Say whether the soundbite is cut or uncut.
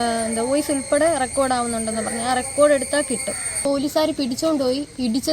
cut